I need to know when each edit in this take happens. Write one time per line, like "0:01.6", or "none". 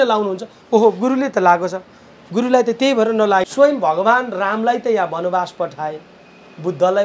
0:03.4

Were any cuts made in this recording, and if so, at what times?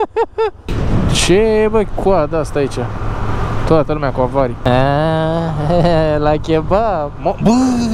none

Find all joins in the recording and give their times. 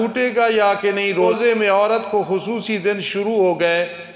0:01.3

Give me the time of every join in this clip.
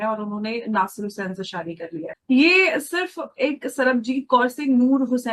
none

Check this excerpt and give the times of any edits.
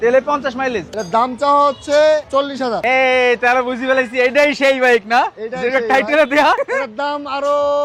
none

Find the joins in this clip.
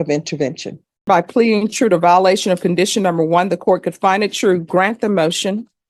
0:01.1

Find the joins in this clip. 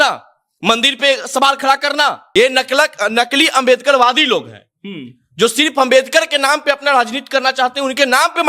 0:02.2

